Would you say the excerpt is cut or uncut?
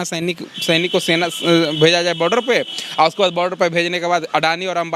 uncut